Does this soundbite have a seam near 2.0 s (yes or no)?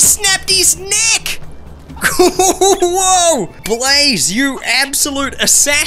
no